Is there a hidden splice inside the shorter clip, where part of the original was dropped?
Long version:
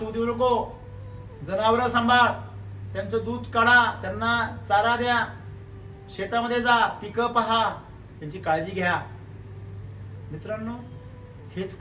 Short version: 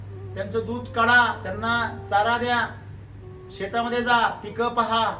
no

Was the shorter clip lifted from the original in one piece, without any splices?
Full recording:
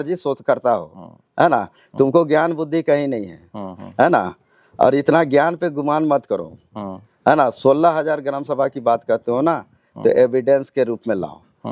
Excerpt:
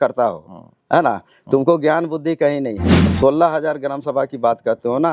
no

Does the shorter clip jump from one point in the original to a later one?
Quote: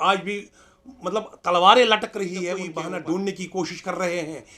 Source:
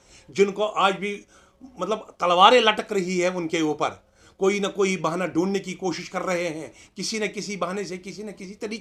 yes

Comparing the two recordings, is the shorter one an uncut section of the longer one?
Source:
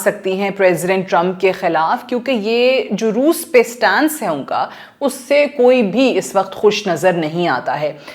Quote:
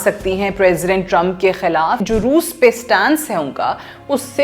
no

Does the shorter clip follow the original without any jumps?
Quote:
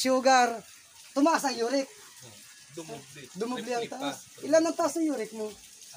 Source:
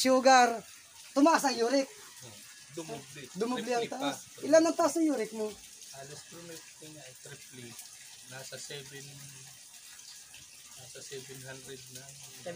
yes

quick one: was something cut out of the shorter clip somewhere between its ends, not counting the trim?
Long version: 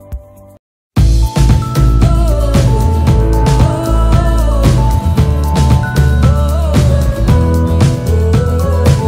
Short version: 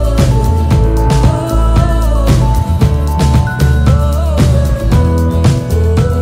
no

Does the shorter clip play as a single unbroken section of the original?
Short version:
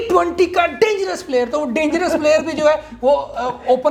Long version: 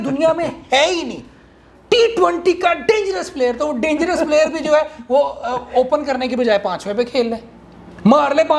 yes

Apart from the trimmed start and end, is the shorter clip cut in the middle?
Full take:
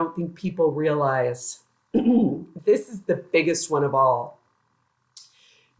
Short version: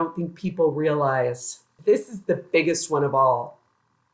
yes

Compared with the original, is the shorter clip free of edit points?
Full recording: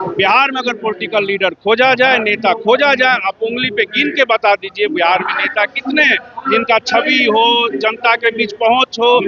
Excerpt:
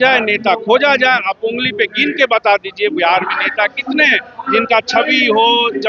yes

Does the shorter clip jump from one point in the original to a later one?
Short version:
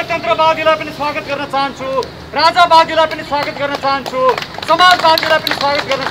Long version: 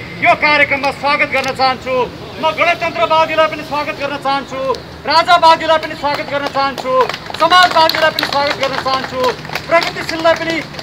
no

